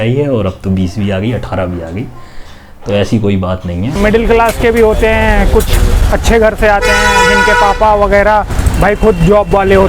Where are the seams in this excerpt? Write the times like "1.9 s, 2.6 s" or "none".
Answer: 3.9 s